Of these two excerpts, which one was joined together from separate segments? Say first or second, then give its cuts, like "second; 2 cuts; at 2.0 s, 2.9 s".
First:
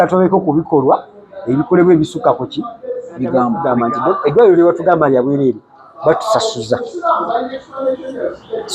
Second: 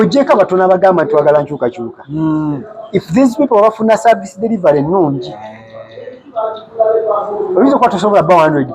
first; 1 cut; at 3.6 s